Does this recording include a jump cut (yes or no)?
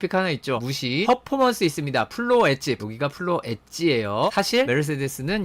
yes